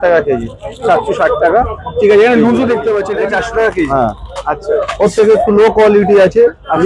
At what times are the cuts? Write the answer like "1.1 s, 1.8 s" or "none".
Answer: 3.1 s